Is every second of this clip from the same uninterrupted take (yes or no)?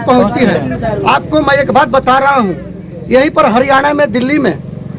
yes